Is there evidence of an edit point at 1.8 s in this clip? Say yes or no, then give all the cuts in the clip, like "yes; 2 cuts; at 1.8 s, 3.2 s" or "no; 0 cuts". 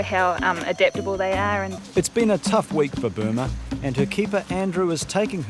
yes; 1 cut; at 1.8 s